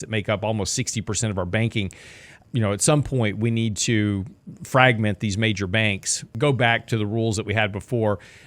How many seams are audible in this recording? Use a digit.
2